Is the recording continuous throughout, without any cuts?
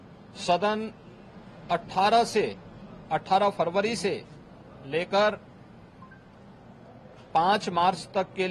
yes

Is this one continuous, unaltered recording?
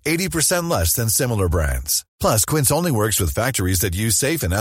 yes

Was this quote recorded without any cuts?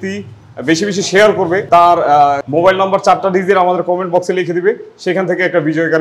no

